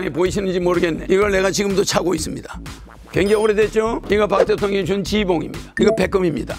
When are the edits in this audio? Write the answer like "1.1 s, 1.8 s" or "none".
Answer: 1.0 s, 4.0 s, 5.6 s